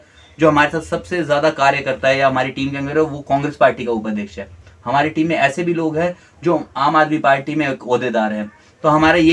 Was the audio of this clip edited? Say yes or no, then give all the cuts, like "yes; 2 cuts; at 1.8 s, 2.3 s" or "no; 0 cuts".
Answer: no; 0 cuts